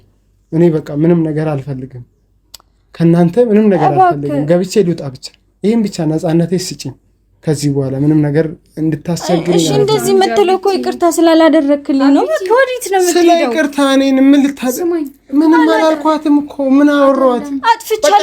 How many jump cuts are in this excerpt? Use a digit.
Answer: 0